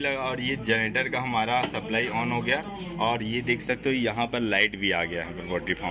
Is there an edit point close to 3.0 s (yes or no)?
no